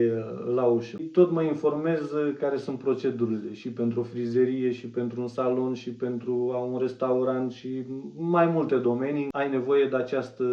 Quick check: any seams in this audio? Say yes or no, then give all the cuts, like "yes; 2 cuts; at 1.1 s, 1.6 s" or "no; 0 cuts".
yes; 2 cuts; at 1.0 s, 9.3 s